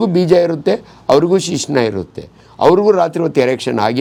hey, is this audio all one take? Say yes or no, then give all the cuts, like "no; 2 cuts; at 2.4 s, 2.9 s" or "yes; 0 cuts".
yes; 0 cuts